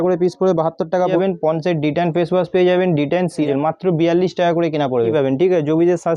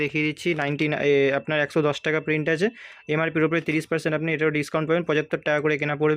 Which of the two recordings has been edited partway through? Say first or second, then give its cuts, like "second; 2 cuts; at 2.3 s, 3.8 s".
first; 3 cuts; at 1.1 s, 3.5 s, 5.1 s